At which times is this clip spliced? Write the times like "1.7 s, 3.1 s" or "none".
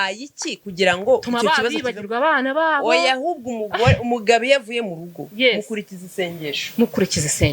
1.6 s